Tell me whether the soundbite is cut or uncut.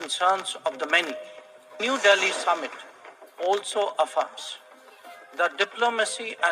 cut